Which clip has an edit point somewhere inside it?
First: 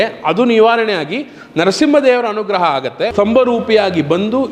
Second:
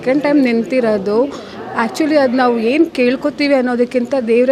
first; 1 cut; at 3.1 s

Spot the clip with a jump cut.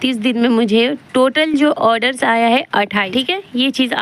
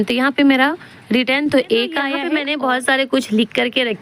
second; 1 cut; at 2.2 s

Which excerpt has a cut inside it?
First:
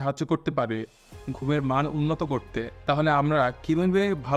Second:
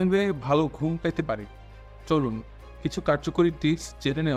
first; 1 cut; at 2.7 s

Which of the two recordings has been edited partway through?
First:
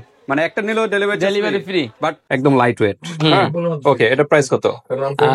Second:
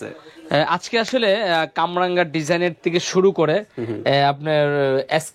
first; 1 cut; at 2.2 s

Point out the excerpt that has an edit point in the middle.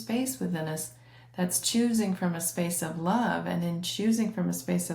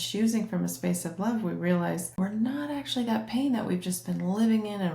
second; 1 cut; at 2.2 s

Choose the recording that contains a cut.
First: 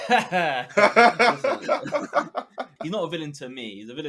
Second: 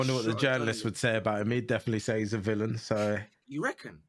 first; 1 cut; at 2.8 s

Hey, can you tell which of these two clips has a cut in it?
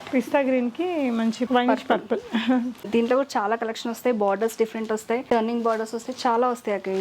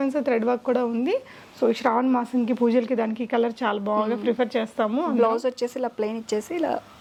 first; 3 cuts; at 1.4 s, 2.8 s, 5.2 s

